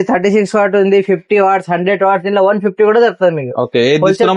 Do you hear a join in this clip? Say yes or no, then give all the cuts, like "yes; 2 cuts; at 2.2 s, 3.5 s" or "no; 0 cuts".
no; 0 cuts